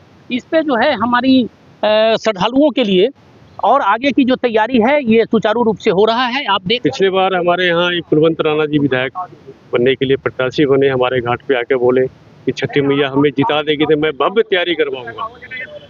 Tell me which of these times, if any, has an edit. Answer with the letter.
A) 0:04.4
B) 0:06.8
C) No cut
B